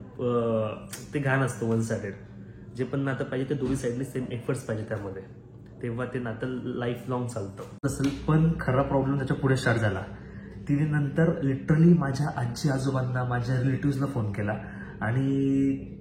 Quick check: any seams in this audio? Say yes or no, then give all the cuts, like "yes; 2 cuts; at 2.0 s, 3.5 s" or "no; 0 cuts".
yes; 1 cut; at 7.8 s